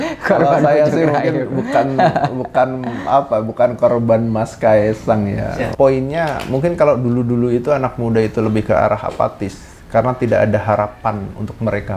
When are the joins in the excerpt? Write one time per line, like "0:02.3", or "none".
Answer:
0:05.7